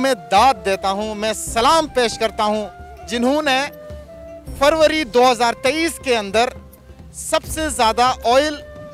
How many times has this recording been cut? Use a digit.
0